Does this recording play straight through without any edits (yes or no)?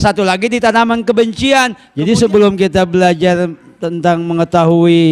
no